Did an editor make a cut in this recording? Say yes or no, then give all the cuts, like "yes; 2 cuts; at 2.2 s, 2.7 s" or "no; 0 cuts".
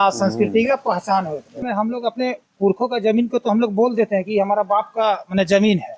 yes; 1 cut; at 1.6 s